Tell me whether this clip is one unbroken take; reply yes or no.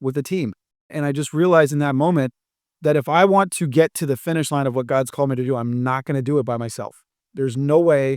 no